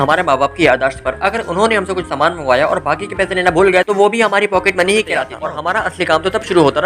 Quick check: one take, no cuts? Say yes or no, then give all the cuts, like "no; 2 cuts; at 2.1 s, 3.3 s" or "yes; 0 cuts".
no; 1 cut; at 5.4 s